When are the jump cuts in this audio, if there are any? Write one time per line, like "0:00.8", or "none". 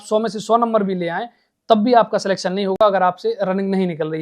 none